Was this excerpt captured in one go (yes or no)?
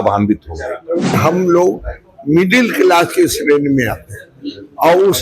no